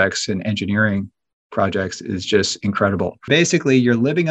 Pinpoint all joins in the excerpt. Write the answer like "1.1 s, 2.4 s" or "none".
3.3 s